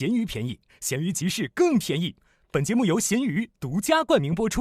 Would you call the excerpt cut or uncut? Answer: uncut